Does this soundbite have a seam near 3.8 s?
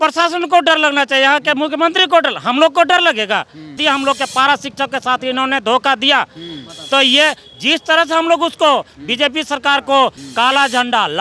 yes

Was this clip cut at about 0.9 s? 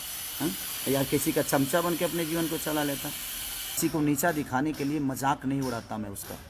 no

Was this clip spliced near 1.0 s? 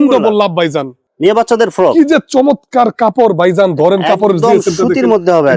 yes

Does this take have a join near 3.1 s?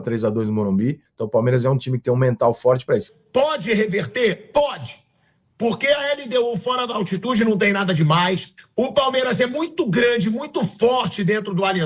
yes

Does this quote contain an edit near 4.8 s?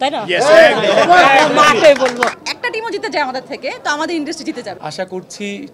yes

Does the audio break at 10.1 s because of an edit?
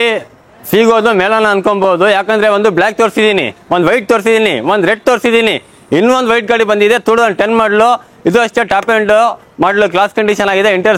no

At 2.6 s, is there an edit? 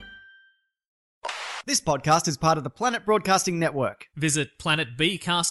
no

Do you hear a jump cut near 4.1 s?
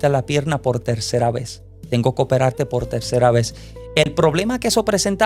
no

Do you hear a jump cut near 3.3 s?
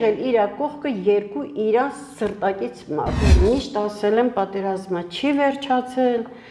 yes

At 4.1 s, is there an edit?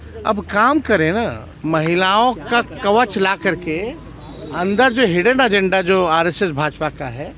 no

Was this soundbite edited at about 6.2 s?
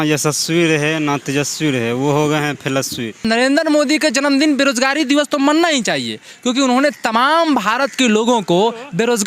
no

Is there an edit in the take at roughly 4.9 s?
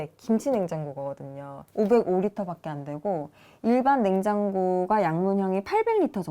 no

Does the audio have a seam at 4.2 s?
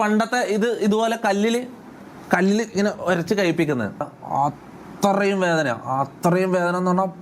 yes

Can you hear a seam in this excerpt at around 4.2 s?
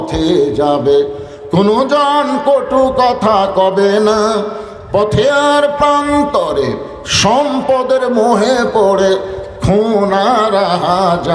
no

